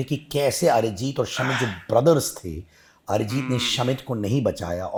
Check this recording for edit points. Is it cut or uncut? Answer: uncut